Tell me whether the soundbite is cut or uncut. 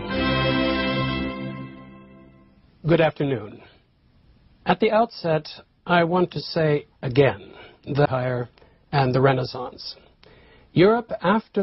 uncut